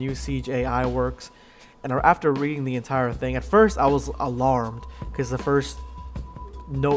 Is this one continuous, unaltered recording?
no; 1 cut; at 4.1 s

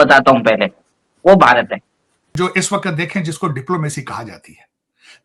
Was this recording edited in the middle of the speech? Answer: yes; 1 cut; at 2.2 s

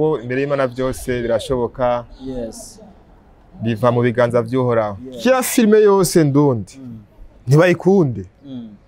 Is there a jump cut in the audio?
yes; 1 cut; at 5.0 s

